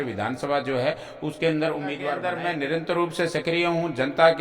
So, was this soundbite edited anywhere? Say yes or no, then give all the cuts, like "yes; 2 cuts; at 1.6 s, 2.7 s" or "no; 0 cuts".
yes; 1 cut; at 2.2 s